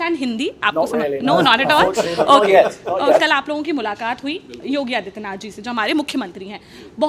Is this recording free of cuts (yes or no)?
no